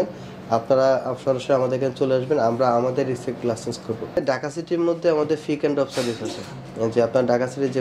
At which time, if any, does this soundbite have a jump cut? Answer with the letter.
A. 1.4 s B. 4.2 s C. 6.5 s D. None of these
B